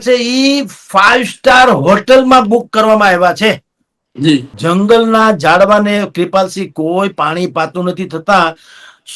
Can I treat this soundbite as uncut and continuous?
no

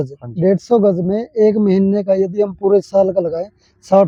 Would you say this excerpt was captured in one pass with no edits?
yes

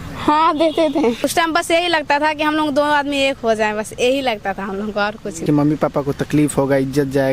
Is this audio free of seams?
no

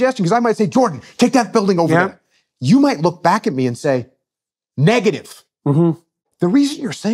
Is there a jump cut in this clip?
yes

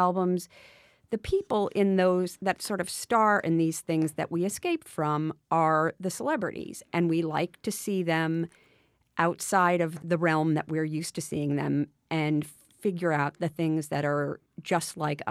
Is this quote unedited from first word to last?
no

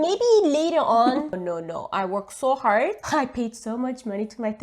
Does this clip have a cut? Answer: yes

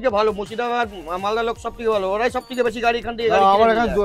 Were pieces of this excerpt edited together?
no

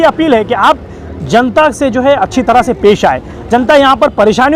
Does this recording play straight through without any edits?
yes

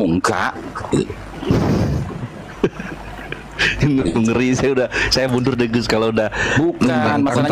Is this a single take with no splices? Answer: yes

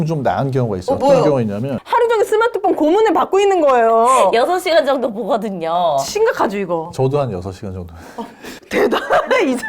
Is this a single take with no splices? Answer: no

